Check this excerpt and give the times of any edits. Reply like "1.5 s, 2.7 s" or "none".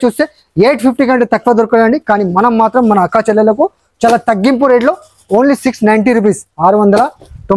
none